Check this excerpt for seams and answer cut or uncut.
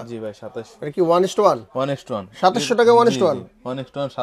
uncut